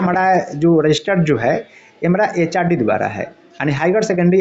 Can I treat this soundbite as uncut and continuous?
yes; 0 cuts

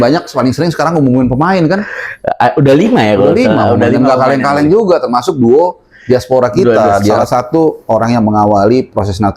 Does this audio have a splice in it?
yes; 1 cut; at 7.2 s

